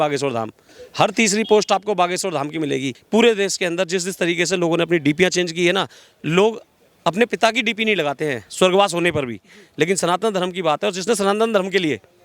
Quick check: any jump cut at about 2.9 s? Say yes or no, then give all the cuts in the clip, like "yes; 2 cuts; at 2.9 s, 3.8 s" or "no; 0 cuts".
yes; 1 cut; at 2.9 s